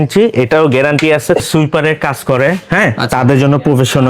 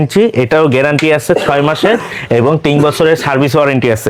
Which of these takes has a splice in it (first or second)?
first